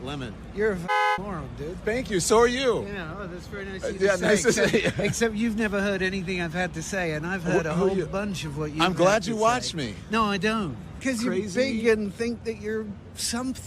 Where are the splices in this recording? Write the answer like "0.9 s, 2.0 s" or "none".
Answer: 11.0 s